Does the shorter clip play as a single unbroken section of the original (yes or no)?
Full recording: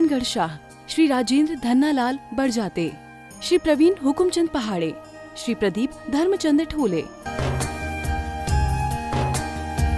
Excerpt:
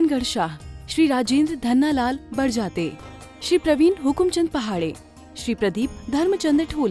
yes